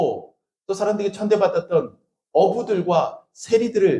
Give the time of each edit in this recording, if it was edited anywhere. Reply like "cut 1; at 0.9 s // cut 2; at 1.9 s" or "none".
none